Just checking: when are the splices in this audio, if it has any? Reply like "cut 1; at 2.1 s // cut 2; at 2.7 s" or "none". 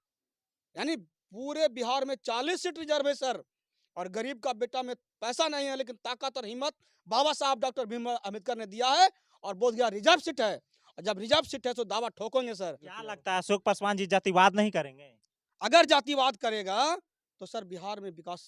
cut 1; at 12.9 s